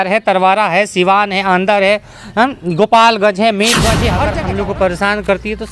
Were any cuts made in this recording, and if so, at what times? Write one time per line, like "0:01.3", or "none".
0:04.2